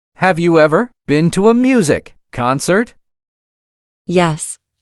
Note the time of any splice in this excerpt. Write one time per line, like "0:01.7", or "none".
0:00.9